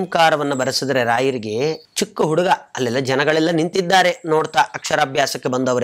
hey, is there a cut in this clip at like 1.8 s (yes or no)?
yes